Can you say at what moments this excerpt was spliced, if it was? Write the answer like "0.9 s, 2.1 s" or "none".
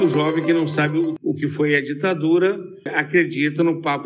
1.2 s, 3.0 s